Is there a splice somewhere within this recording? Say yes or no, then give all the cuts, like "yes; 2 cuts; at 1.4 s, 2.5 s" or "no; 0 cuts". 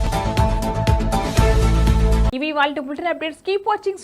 no; 0 cuts